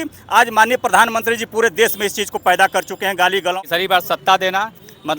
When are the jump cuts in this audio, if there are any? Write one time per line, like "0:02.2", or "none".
0:03.6